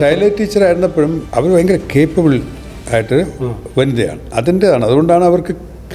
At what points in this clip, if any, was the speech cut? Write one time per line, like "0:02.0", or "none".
0:01.2